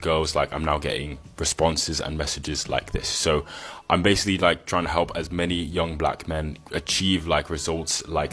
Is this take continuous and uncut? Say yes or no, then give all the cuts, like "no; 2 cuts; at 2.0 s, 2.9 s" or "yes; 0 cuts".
yes; 0 cuts